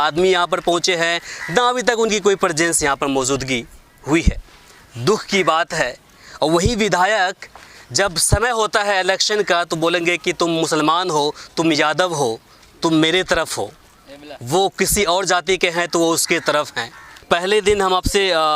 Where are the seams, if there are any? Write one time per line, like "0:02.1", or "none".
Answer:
0:17.1